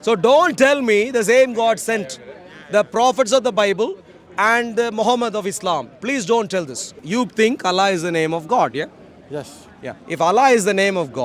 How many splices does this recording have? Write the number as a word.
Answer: one